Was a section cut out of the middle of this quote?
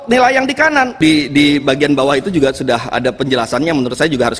yes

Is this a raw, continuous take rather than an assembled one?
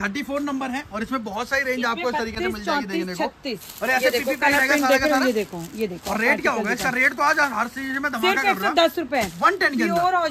yes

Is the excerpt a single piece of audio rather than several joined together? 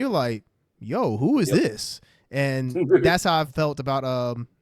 no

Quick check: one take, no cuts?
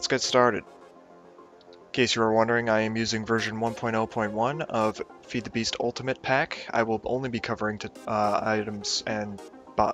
yes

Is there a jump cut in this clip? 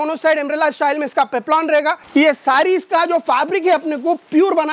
yes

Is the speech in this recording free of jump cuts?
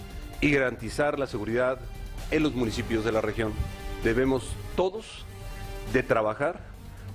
no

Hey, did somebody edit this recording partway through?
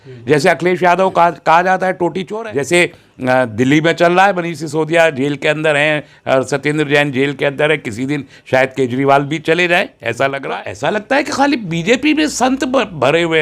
yes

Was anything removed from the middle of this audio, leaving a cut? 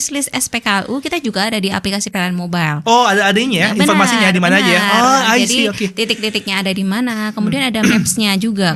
no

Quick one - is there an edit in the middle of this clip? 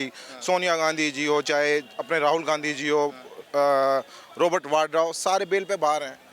no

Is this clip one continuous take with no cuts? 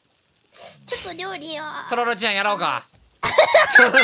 yes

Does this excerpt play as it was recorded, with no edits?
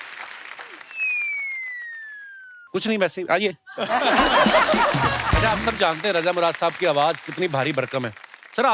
no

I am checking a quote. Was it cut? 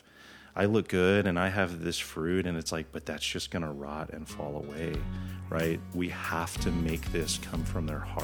no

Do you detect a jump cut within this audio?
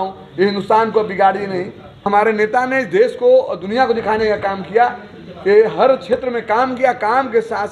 yes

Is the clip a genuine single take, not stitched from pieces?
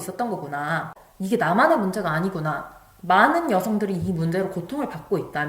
no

